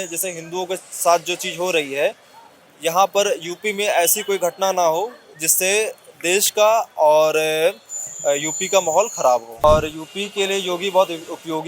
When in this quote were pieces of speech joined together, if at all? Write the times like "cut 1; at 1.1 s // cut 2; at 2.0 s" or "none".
cut 1; at 9.6 s

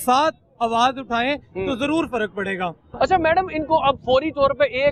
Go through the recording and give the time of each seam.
none

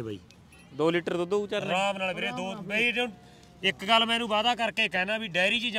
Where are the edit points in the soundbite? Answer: none

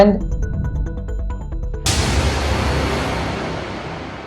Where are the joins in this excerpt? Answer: cut 1; at 1.8 s

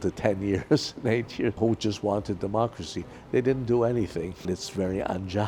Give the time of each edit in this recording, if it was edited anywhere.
cut 1; at 1.6 s // cut 2; at 4.5 s

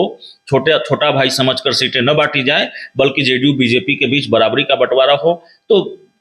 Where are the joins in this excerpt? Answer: none

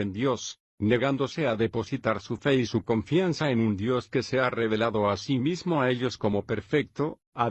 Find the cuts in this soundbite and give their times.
cut 1; at 6.0 s

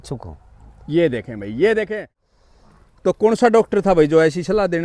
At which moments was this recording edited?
cut 1; at 2.0 s

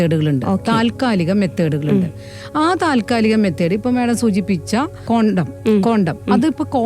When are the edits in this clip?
cut 1; at 5.0 s

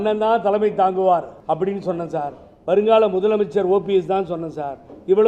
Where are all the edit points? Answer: cut 1; at 1.3 s

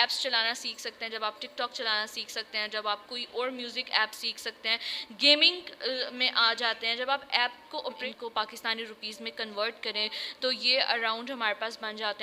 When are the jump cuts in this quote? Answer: cut 1; at 8.0 s

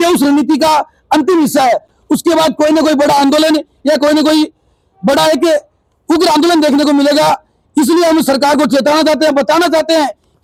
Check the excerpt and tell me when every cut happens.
none

